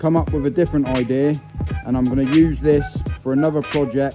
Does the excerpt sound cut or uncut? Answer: uncut